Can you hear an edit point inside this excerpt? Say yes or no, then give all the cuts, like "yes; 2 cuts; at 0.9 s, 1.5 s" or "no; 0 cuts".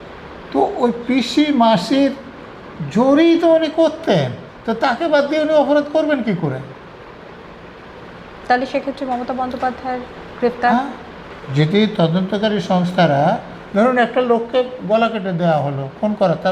no; 0 cuts